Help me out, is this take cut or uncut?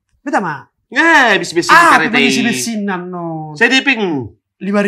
uncut